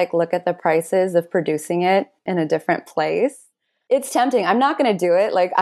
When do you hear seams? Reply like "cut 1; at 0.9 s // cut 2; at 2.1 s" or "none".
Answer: none

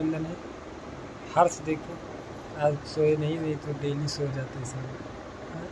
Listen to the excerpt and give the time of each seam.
none

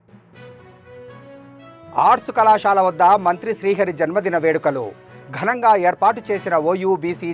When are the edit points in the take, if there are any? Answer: none

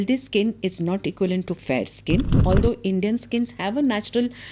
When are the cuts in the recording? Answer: cut 1; at 2.4 s

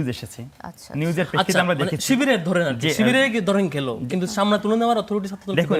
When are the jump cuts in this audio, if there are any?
none

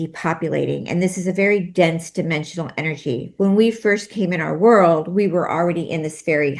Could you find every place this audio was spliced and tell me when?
none

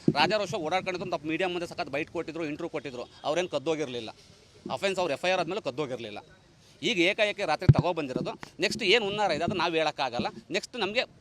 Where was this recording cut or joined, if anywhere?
cut 1; at 10.2 s

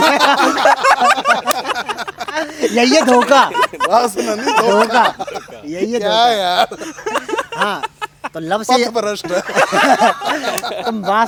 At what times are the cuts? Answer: none

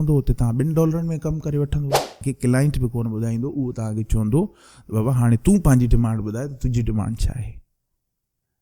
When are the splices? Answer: cut 1; at 2.2 s

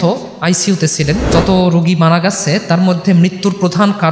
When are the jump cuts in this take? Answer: cut 1; at 1.3 s

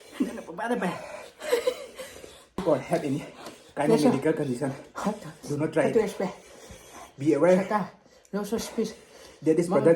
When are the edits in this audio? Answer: cut 1; at 2.6 s

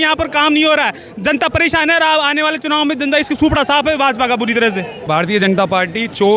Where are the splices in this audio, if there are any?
cut 1; at 5.0 s

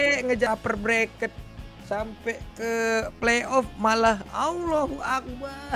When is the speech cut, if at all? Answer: none

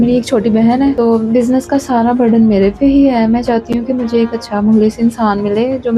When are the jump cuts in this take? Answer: cut 1; at 1.0 s

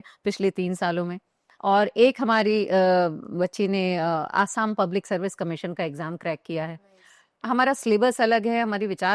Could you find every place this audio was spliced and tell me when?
cut 1; at 7.4 s

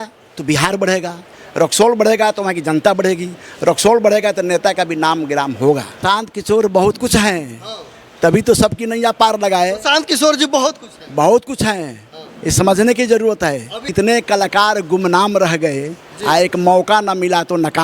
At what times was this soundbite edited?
cut 1; at 6.0 s // cut 2; at 13.8 s

